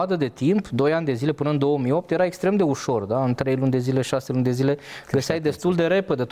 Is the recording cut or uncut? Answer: uncut